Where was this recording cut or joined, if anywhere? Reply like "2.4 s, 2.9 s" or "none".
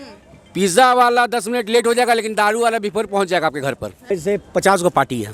3.9 s